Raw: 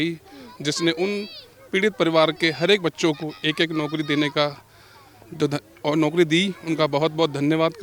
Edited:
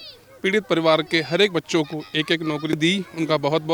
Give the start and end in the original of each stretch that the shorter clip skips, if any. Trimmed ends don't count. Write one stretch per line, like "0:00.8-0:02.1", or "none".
0:04.1-0:06.3